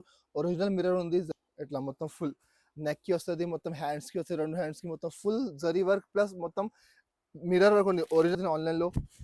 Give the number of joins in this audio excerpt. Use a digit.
2